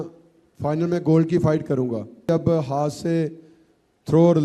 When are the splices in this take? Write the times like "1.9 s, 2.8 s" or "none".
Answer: 2.3 s